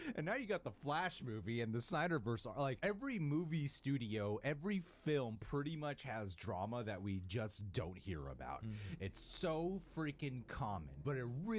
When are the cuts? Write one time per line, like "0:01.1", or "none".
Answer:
none

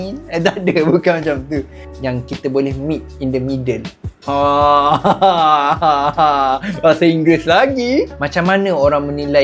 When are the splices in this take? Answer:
0:01.8
0:08.2

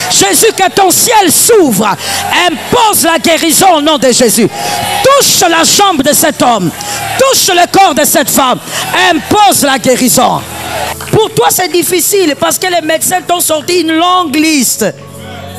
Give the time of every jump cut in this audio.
0:10.9

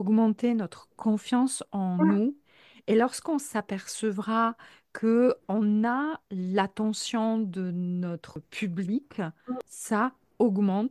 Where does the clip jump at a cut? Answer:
0:08.5
0:09.7

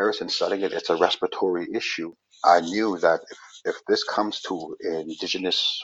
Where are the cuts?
0:02.0

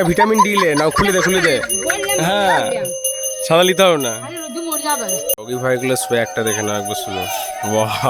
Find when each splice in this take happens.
none

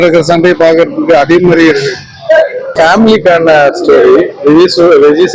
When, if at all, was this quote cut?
0:02.6

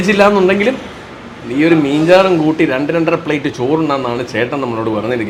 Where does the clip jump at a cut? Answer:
none

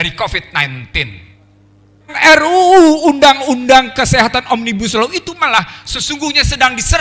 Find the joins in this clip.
0:02.1

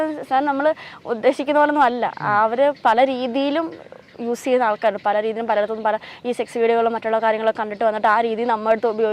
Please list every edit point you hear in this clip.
none

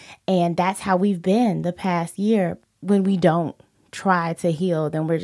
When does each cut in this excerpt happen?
0:02.7

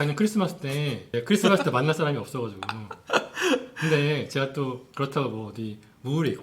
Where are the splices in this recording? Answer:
0:01.0

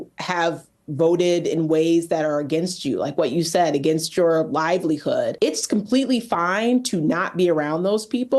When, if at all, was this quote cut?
0:05.3

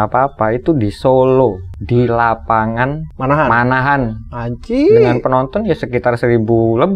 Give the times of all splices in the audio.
0:01.7
0:03.1

